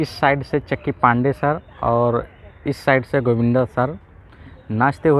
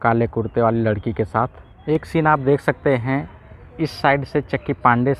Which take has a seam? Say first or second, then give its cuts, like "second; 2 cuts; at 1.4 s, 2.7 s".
second; 1 cut; at 1.7 s